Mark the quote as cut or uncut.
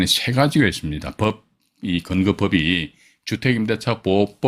uncut